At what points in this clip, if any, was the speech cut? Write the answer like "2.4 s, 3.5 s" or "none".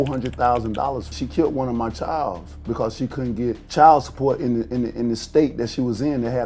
1.1 s, 3.6 s